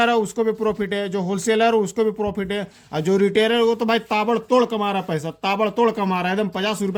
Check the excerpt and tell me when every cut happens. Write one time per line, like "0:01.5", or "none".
none